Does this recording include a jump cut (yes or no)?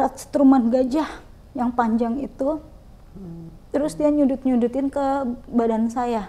no